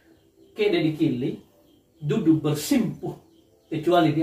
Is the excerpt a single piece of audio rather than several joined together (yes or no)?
yes